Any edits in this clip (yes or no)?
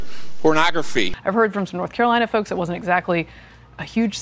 yes